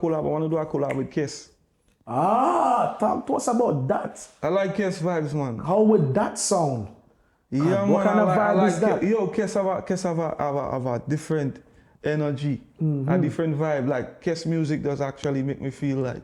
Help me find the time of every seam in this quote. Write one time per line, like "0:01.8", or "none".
none